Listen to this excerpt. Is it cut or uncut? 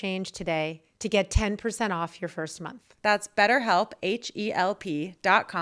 uncut